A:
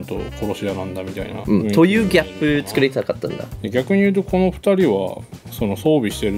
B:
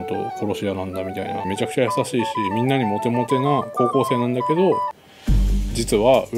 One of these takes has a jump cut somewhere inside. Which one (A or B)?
B